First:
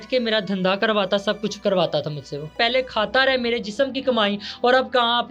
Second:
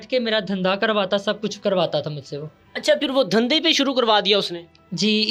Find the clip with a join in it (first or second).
first